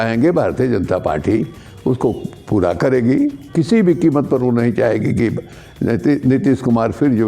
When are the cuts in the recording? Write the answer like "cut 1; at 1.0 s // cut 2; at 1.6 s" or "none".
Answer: cut 1; at 3.4 s